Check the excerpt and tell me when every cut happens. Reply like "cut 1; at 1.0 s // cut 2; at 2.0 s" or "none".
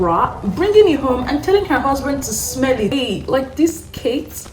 cut 1; at 2.9 s